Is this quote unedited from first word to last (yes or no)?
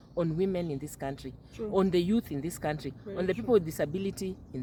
yes